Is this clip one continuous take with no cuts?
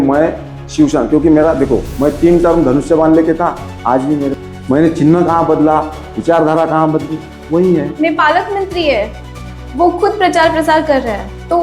no; 2 cuts; at 4.4 s, 7.9 s

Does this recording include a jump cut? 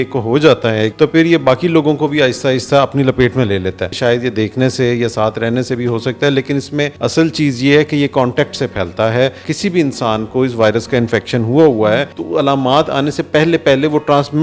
yes; 5 cuts; at 0.9 s, 3.9 s, 6.9 s, 9.4 s, 12.2 s

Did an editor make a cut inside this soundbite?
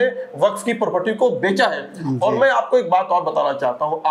no; 0 cuts

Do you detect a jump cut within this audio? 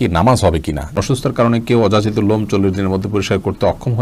yes; 1 cut; at 1.0 s

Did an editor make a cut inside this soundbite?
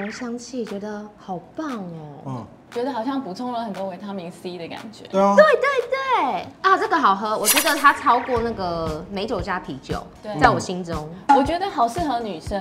no; 0 cuts

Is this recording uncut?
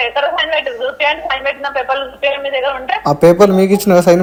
yes; 0 cuts

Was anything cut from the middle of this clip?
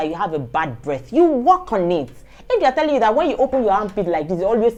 no; 0 cuts

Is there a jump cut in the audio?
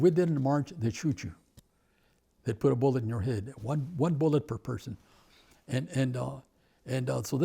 no; 0 cuts

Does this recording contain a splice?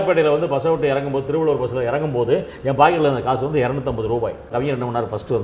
yes; 1 cut; at 4.5 s

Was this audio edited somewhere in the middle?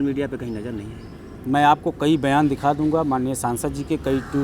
no; 0 cuts

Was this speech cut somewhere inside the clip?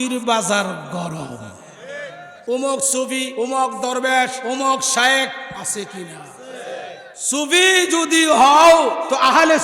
yes; 4 cuts; at 2.3 s, 3.3 s, 4.4 s, 7.1 s

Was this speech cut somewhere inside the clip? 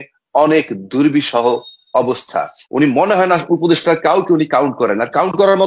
yes; 1 cut; at 2.6 s

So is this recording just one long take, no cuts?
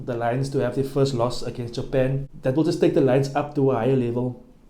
no; 1 cut; at 2.3 s

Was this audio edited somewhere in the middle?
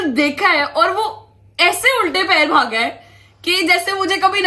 no; 0 cuts

